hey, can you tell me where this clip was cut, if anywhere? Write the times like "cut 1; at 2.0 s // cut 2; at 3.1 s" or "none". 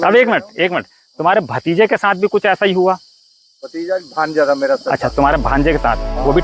none